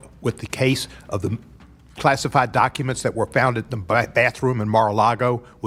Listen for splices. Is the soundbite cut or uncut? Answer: uncut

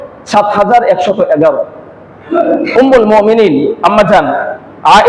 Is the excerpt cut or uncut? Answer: uncut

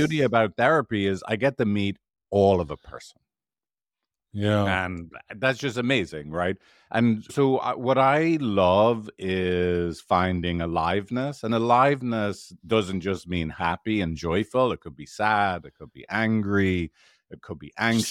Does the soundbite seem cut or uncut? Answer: uncut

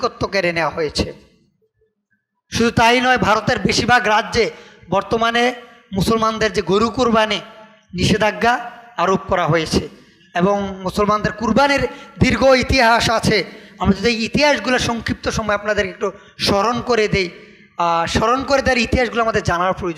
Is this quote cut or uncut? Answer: uncut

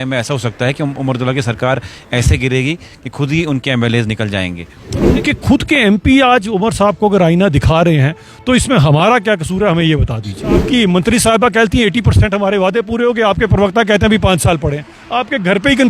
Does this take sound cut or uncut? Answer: cut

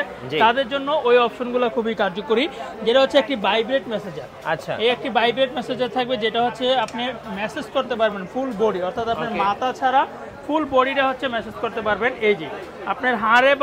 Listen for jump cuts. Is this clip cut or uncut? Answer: uncut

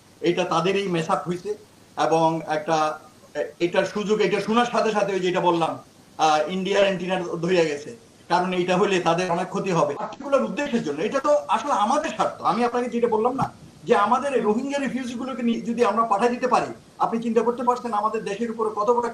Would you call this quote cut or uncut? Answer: cut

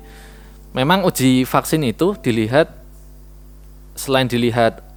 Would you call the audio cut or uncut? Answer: uncut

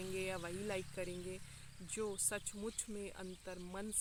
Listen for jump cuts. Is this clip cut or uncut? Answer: uncut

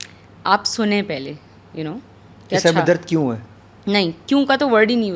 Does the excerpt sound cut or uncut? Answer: uncut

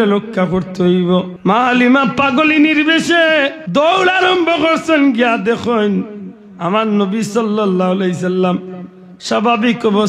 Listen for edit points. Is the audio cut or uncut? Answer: cut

